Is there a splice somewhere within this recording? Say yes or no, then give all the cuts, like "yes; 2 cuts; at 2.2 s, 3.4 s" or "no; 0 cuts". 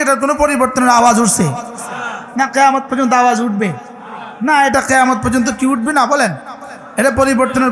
no; 0 cuts